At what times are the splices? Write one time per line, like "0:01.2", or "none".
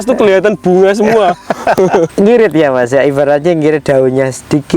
0:02.1

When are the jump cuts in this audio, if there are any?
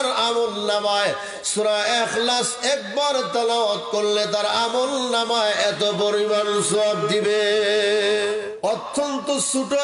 0:08.4

